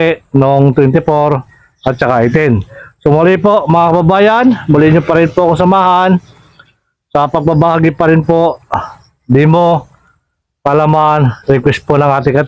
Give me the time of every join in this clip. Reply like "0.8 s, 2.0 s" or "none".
none